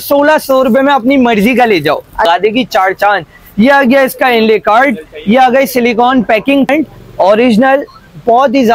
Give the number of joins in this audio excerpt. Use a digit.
2